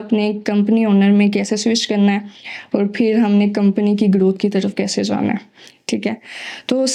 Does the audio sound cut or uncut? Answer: uncut